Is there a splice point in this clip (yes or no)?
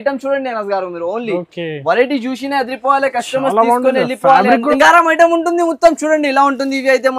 yes